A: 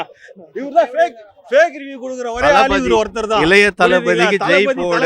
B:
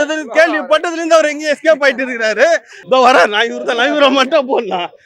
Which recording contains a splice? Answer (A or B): B